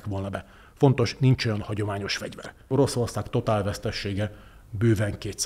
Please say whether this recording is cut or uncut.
cut